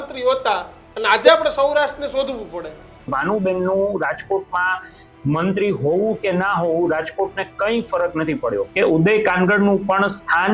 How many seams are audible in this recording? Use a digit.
2